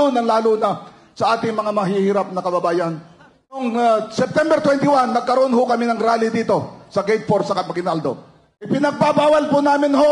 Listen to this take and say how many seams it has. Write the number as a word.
two